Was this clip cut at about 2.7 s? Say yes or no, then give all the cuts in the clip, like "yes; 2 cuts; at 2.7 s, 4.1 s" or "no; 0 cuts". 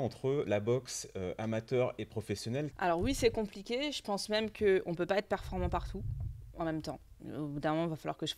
yes; 1 cut; at 2.7 s